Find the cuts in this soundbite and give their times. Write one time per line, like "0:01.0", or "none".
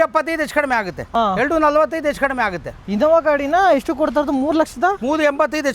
0:01.1
0:02.7